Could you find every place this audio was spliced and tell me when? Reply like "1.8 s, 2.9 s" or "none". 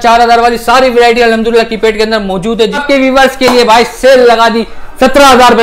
2.8 s